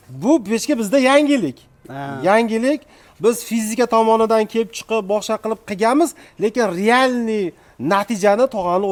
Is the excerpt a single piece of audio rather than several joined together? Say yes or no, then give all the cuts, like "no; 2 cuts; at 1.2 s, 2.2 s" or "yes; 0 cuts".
yes; 0 cuts